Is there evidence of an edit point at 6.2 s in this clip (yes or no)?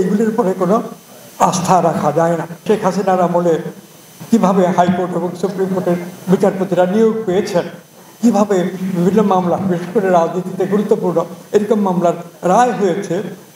no